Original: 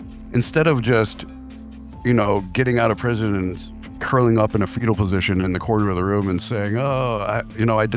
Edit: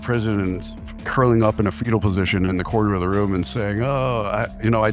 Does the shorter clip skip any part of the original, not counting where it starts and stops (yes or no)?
no